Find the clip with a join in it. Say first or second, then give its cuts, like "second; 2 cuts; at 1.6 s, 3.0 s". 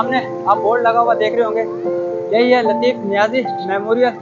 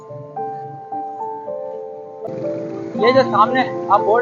second; 1 cut; at 2.3 s